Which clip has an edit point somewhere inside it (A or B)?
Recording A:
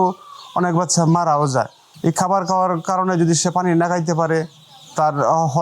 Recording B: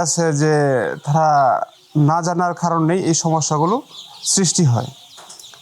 A